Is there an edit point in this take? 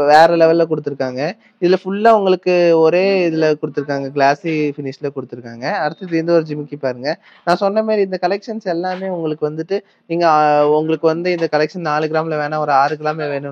no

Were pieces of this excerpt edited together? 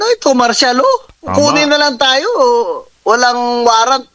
yes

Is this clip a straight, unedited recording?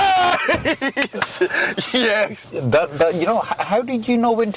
no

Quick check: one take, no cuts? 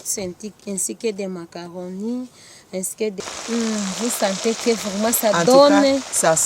no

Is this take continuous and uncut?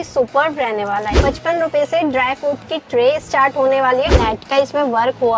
no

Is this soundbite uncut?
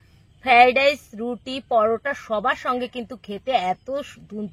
yes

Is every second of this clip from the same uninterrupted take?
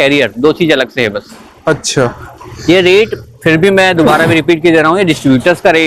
yes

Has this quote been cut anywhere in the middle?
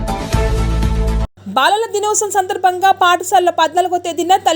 yes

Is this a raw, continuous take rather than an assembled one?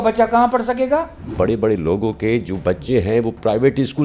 no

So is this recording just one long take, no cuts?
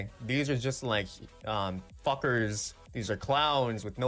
yes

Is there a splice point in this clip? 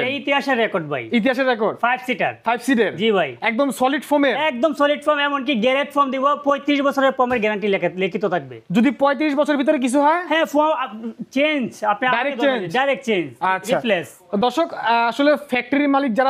no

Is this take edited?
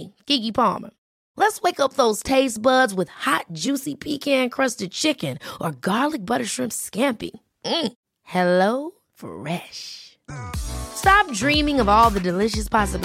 no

